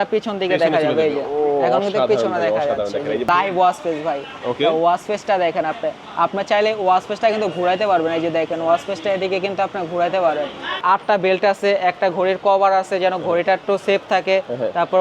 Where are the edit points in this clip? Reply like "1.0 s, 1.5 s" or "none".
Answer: 3.3 s, 10.8 s